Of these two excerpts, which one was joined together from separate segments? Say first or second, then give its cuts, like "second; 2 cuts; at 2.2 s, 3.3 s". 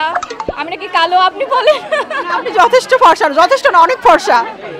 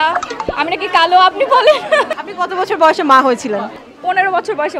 second; 2 cuts; at 2.2 s, 3.8 s